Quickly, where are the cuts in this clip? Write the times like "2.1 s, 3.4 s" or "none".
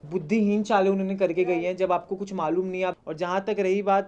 2.9 s

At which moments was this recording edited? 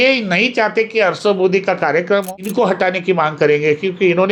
2.8 s

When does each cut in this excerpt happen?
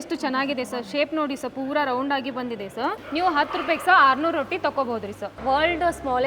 3.0 s, 5.3 s

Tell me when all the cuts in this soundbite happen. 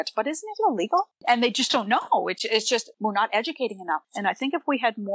1.2 s, 4.1 s

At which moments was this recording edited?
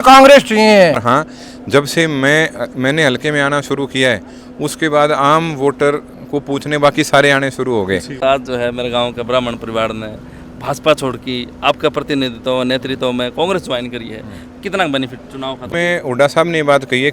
1.0 s, 8.2 s, 15.6 s

